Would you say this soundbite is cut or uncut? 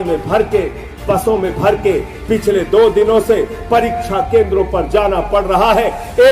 uncut